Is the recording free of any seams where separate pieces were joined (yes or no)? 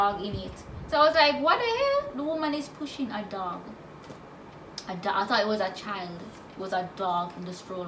yes